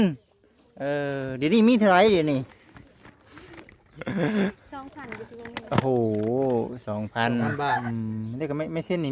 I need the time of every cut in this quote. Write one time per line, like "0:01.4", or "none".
0:07.8